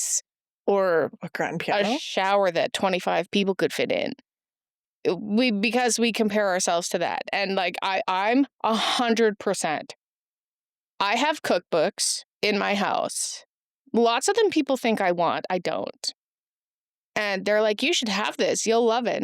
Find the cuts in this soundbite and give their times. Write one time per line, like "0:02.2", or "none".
none

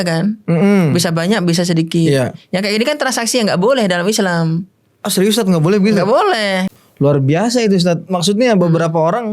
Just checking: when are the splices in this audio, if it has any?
0:06.7

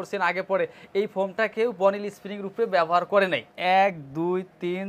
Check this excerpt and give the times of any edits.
0:03.5

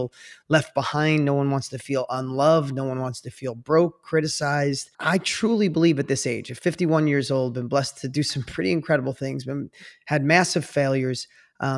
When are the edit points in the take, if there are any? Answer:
0:04.9

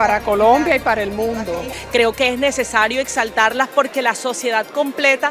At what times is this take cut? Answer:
0:01.5

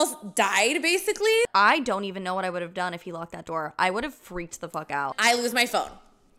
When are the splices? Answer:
0:01.5
0:05.2

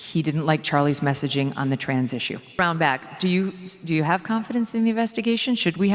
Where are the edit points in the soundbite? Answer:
0:02.6

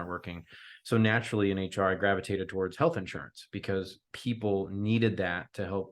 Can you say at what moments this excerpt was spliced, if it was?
0:04.0

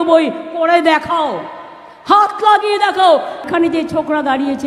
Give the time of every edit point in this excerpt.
0:03.5

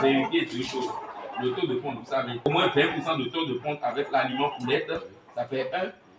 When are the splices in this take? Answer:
0:02.5

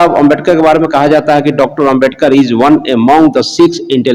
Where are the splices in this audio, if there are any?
none

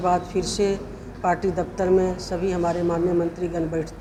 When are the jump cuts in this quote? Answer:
none

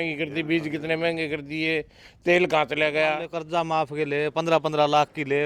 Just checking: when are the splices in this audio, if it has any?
0:03.3

